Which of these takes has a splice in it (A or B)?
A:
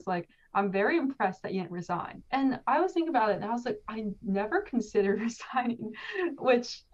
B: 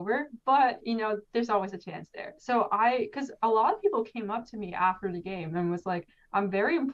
B